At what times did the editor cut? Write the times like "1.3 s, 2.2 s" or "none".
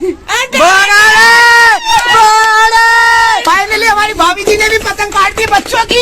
3.4 s